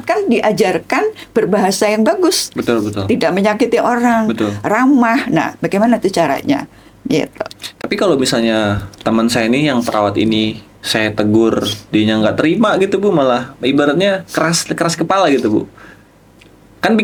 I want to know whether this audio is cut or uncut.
uncut